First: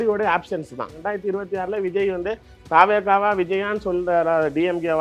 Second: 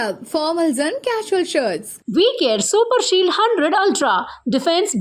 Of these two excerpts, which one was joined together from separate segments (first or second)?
first